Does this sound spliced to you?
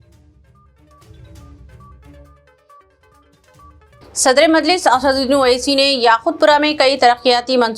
yes; 1 cut; at 2.4 s

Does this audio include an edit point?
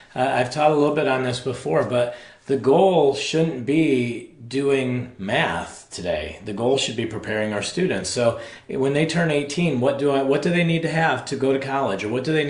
no; 0 cuts

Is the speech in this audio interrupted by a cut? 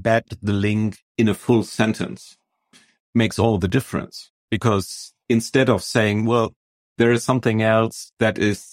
yes; 2 cuts; at 3.0 s, 4.3 s

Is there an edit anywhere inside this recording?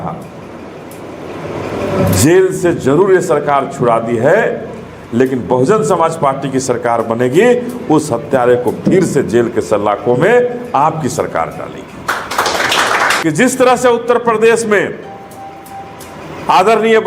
yes; 1 cut; at 13.2 s

